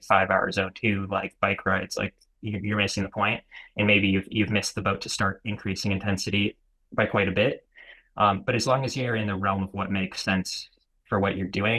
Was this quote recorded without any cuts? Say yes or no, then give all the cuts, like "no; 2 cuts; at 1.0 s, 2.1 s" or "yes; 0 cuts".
yes; 0 cuts